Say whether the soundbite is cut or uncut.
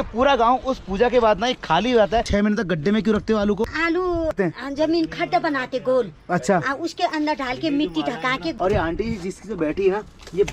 cut